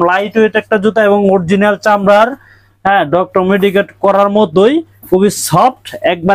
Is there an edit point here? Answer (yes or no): no